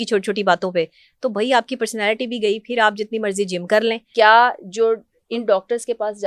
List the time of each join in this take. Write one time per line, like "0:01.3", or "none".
0:04.0